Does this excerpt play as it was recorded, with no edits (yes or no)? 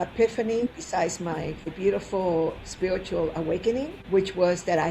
no